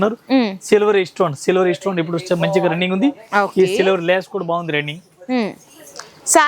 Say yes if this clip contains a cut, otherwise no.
no